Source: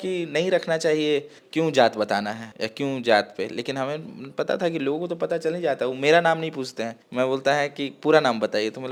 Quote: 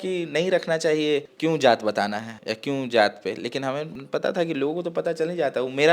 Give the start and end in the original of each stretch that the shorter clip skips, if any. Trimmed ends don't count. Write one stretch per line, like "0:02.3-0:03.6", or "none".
0:01.3-0:01.4
0:04.1-0:04.2